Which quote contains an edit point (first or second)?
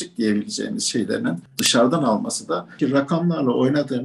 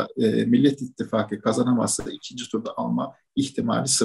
first